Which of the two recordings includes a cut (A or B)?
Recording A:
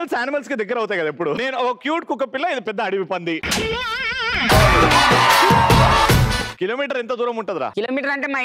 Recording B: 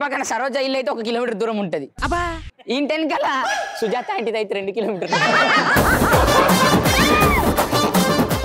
A